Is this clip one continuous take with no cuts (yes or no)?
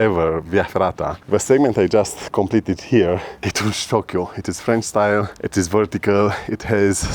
no